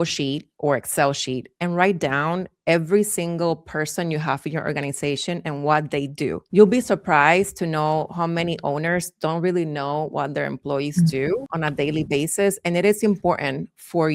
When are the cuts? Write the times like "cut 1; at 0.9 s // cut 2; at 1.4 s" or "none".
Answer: cut 1; at 6.4 s // cut 2; at 11.5 s